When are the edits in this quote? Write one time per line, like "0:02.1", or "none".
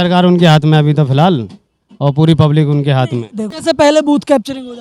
0:03.6